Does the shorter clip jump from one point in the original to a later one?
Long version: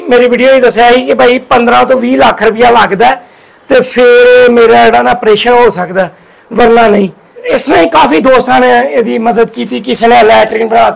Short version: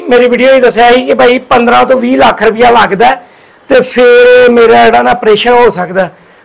no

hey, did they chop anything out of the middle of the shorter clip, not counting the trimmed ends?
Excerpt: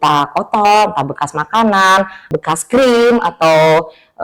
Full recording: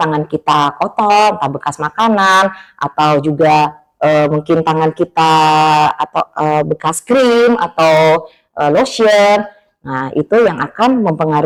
yes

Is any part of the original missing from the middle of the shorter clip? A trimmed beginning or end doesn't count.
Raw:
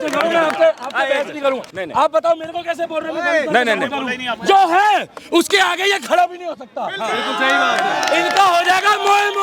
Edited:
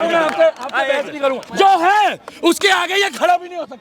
yes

